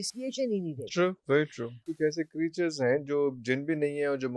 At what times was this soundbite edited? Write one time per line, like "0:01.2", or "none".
0:01.9